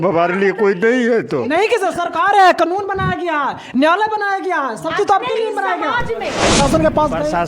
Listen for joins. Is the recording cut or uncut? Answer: cut